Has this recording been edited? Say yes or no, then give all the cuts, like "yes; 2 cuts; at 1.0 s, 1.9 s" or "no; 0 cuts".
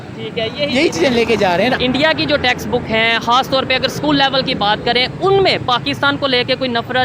yes; 1 cut; at 1.8 s